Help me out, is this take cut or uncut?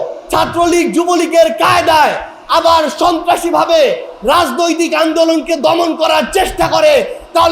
uncut